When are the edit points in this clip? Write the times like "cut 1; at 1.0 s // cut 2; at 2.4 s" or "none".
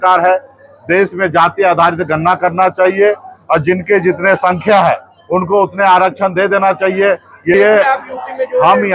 cut 1; at 7.5 s